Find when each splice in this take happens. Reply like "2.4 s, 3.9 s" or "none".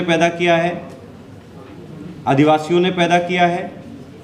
none